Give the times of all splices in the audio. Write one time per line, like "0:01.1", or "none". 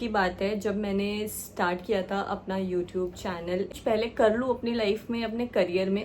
0:03.7